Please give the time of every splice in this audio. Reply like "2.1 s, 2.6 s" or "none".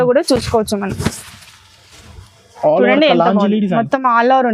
none